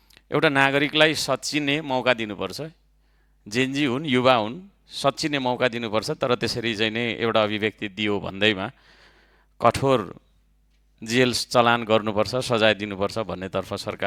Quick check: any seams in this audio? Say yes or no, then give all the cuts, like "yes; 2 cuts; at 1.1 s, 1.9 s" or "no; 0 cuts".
no; 0 cuts